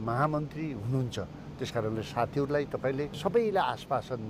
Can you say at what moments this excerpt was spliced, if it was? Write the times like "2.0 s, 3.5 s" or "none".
3.1 s